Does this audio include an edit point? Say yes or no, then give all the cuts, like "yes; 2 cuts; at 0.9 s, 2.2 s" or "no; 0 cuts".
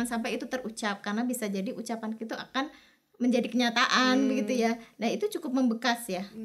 no; 0 cuts